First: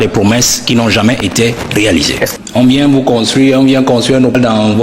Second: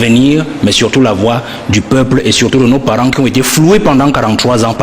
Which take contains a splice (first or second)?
first